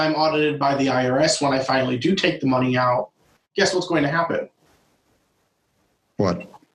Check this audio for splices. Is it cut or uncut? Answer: uncut